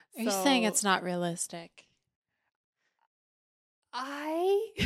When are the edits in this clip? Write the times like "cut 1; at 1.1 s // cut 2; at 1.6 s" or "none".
none

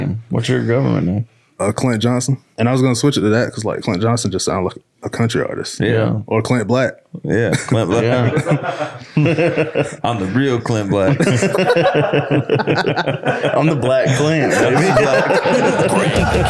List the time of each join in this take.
cut 1; at 2.4 s // cut 2; at 6.2 s

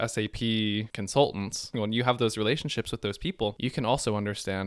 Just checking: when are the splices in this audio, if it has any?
cut 1; at 1.0 s // cut 2; at 1.7 s // cut 3; at 3.6 s

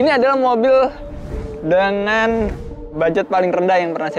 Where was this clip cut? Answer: cut 1; at 2.7 s

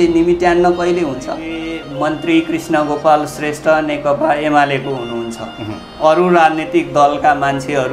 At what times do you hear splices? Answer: cut 1; at 1.8 s

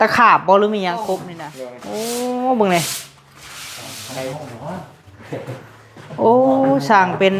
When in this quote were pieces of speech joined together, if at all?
cut 1; at 1.1 s // cut 2; at 4.3 s

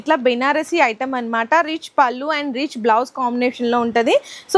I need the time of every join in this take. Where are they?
none

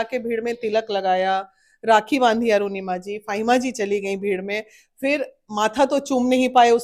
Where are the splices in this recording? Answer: none

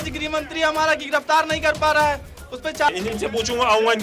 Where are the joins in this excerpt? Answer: none

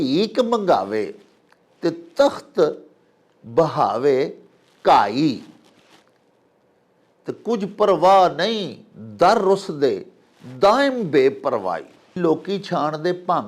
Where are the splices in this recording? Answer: cut 1; at 12.2 s

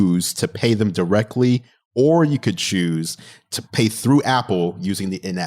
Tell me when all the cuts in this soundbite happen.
cut 1; at 1.8 s

